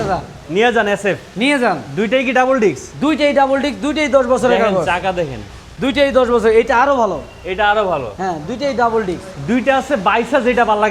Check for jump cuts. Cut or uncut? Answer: uncut